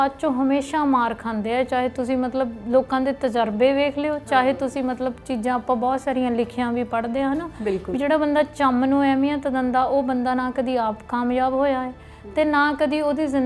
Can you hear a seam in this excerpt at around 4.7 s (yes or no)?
no